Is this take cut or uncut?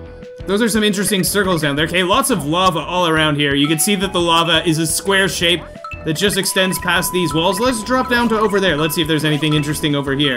uncut